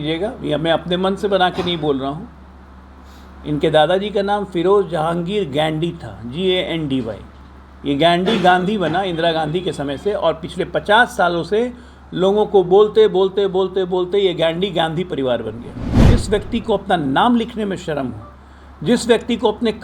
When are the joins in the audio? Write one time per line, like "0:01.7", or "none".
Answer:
0:16.0

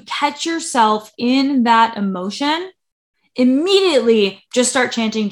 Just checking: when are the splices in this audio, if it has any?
0:04.4

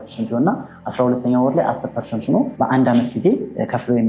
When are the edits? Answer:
0:02.6

